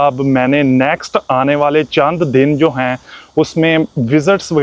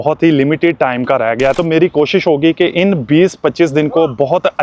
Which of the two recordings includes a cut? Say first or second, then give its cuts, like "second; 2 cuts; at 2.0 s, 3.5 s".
second; 1 cut; at 1.5 s